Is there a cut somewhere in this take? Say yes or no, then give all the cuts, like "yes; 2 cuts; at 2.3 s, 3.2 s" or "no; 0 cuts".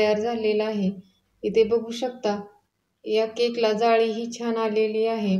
no; 0 cuts